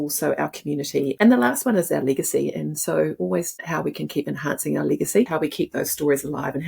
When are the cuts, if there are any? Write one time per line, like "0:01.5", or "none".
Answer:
0:01.1
0:05.3